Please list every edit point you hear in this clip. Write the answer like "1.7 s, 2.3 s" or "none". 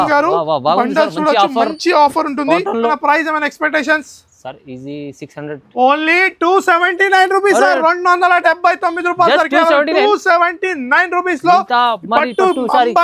2.9 s